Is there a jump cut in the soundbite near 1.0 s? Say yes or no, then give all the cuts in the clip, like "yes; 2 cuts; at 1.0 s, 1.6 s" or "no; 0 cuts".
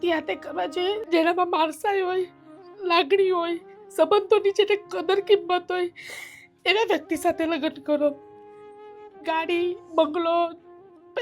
yes; 1 cut; at 1.0 s